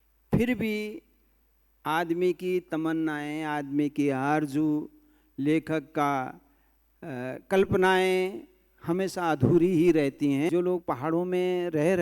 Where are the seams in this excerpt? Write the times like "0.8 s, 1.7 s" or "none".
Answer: 10.5 s